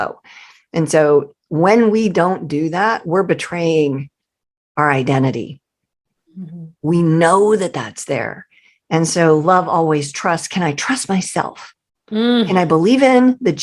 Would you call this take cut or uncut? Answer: uncut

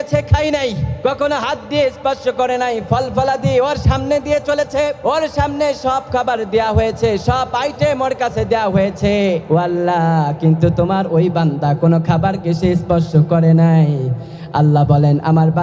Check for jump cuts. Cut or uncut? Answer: uncut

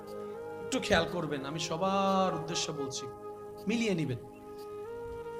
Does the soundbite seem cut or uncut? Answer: cut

